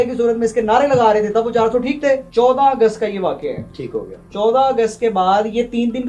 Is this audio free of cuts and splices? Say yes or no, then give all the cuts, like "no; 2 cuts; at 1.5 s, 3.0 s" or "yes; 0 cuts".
no; 2 cuts; at 2.3 s, 4.2 s